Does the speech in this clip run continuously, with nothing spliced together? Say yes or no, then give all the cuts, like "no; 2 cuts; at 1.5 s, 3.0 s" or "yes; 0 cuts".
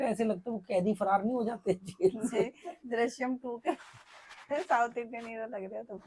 yes; 0 cuts